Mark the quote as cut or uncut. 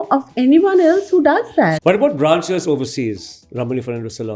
cut